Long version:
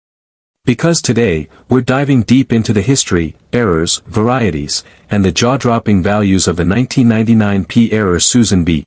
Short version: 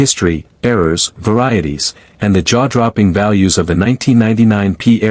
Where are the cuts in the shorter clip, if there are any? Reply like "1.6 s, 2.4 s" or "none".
none